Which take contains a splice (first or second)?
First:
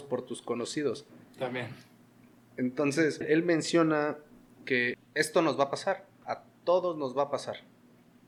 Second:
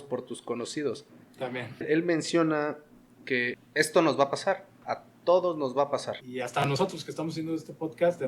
second